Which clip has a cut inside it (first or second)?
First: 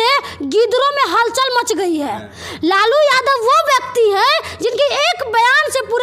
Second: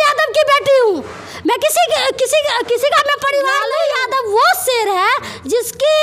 second